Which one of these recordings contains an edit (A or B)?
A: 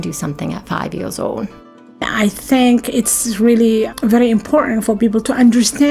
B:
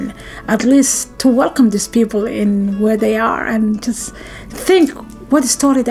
A